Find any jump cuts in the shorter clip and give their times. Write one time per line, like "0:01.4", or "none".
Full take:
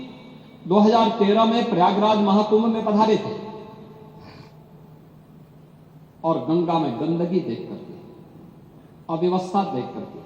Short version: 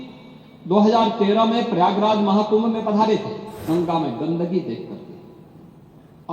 0:03.6